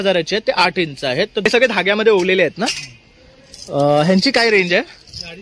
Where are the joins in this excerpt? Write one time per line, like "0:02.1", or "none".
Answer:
0:01.5